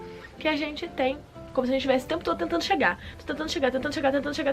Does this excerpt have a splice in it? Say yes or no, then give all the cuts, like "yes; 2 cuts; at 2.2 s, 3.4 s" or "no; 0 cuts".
yes; 1 cut; at 1.3 s